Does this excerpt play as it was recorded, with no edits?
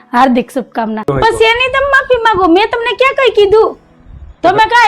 no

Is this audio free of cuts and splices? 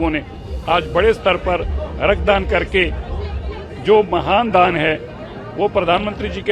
yes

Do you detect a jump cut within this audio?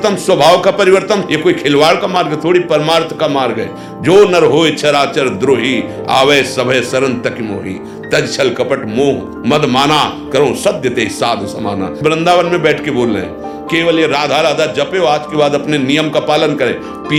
no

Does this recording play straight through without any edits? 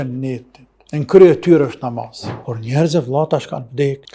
no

